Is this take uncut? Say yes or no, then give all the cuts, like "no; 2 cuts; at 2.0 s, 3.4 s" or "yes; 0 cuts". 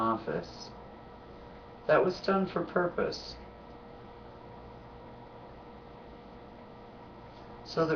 no; 1 cut; at 2.9 s